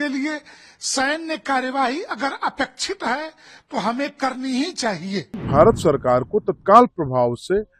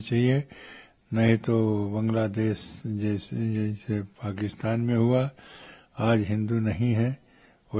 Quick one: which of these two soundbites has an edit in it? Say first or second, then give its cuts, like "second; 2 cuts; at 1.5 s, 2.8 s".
first; 1 cut; at 5.4 s